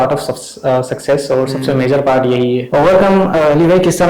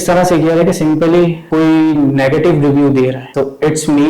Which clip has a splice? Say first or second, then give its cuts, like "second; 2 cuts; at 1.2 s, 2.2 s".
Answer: second; 2 cuts; at 1.4 s, 3.3 s